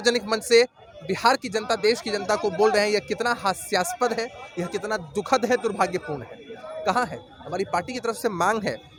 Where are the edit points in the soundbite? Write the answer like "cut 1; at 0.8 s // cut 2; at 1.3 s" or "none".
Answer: none

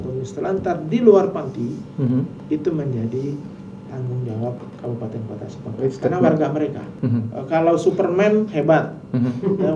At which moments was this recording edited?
cut 1; at 7.0 s

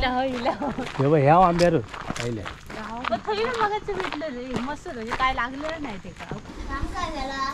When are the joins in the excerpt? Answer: cut 1; at 6.5 s

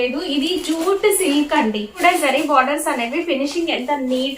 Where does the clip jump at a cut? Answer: cut 1; at 1.9 s

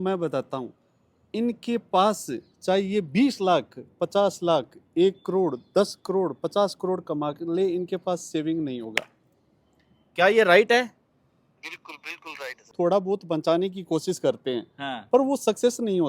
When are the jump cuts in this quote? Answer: cut 1; at 12.7 s

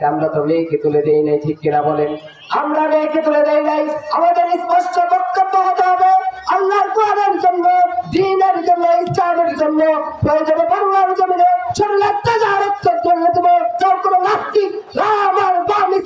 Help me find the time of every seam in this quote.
none

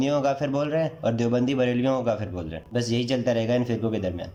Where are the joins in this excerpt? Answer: none

